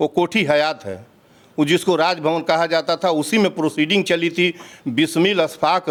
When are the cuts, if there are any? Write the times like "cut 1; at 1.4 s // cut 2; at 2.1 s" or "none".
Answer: none